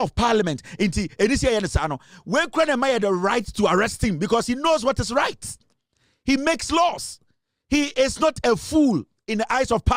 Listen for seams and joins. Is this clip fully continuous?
yes; 0 cuts

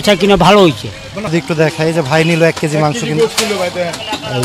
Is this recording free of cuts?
no; 1 cut; at 1.3 s

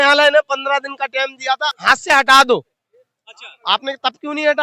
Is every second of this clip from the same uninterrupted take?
no; 1 cut; at 1.8 s

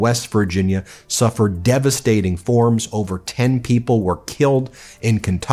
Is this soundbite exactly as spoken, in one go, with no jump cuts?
yes; 0 cuts

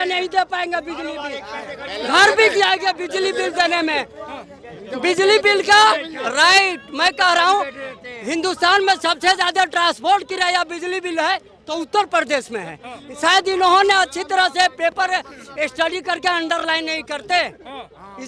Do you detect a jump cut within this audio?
no; 0 cuts

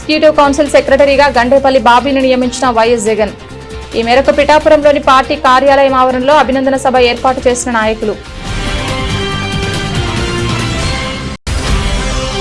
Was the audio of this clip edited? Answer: no; 0 cuts

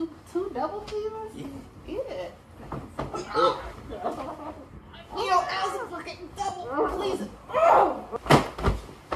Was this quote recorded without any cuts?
no; 1 cut; at 8.1 s

